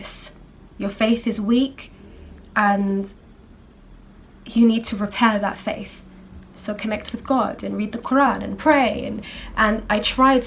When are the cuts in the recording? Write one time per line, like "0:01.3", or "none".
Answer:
none